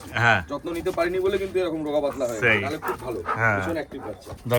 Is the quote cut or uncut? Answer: uncut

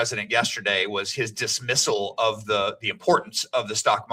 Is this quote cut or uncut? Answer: uncut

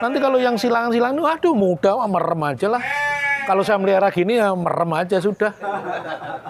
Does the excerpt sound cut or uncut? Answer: uncut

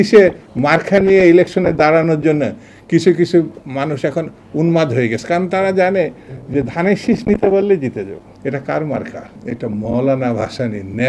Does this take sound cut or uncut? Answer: uncut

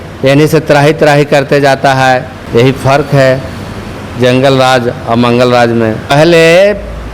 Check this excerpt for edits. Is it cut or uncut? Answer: cut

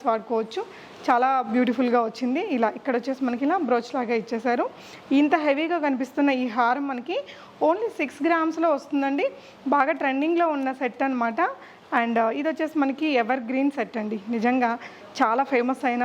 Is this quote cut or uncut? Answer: uncut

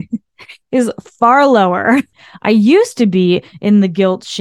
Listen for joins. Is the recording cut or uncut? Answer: cut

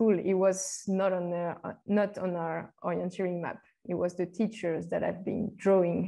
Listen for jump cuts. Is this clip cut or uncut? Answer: uncut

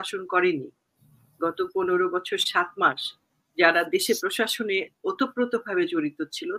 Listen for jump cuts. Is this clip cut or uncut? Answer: uncut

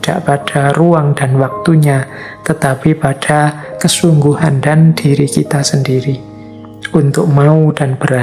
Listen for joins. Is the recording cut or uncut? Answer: uncut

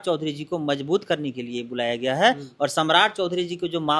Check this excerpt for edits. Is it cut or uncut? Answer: uncut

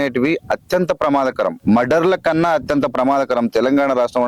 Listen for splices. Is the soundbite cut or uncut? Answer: cut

